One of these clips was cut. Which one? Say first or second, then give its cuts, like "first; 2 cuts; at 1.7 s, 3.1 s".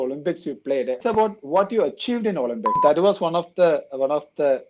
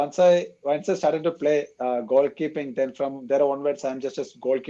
first; 2 cuts; at 1.0 s, 2.8 s